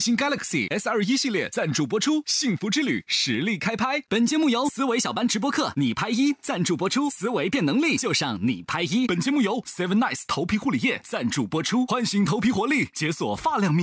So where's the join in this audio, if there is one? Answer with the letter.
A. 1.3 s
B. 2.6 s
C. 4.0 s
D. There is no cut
D